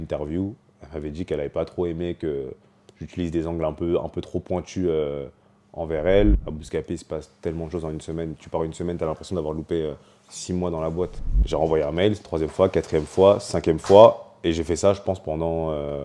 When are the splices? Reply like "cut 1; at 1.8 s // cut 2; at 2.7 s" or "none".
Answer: cut 1; at 6.4 s // cut 2; at 11.2 s